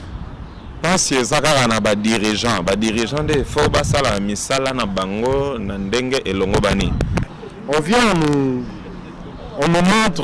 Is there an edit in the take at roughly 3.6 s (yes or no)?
no